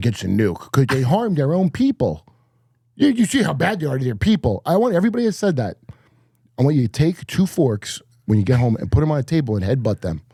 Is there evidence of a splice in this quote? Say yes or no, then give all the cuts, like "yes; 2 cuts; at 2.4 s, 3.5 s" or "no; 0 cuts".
no; 0 cuts